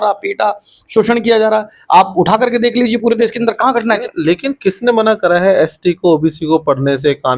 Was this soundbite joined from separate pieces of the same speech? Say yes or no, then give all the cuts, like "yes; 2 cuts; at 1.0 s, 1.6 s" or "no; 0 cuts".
yes; 1 cut; at 3.9 s